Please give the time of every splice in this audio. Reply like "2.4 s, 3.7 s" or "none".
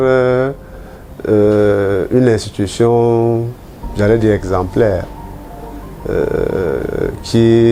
none